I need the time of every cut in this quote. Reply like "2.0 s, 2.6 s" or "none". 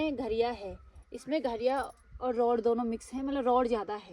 none